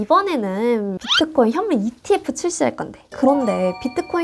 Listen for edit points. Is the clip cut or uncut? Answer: cut